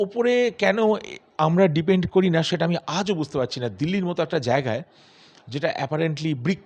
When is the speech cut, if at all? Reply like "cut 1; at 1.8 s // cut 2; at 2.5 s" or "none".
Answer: none